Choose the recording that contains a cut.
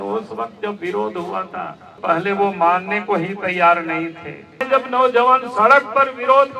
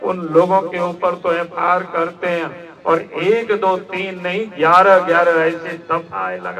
first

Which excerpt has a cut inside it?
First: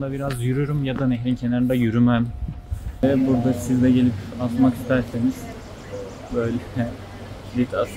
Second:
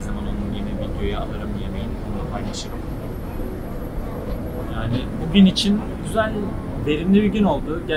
first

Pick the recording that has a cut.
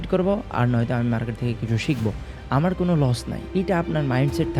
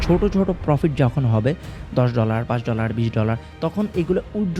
first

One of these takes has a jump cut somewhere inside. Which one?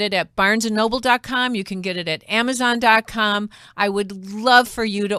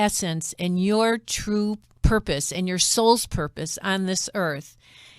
second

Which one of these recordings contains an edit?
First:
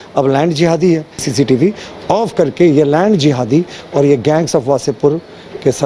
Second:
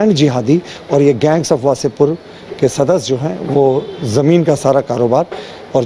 first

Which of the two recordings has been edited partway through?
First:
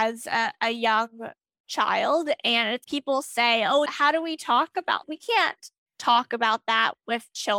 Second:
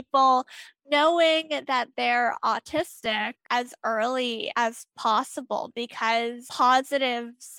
second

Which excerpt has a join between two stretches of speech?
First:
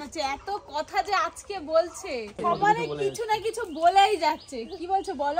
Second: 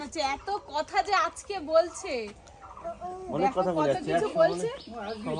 first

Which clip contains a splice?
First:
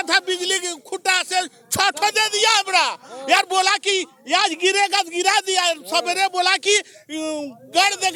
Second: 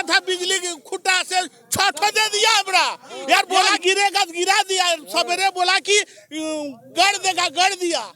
second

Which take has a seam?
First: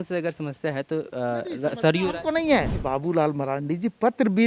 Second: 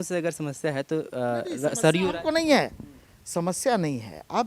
first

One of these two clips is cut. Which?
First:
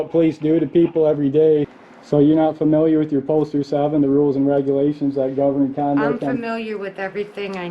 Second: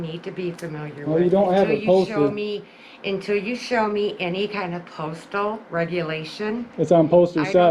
first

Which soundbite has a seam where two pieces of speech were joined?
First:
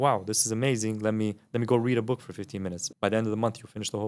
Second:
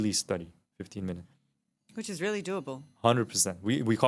first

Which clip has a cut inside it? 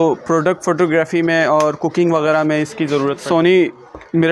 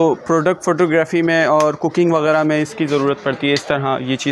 first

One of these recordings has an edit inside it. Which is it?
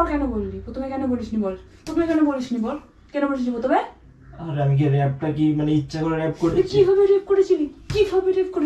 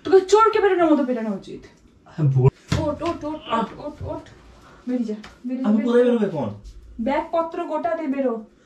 second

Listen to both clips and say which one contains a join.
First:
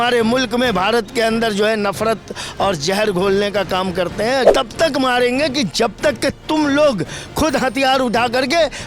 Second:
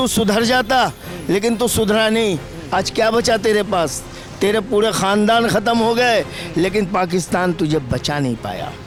first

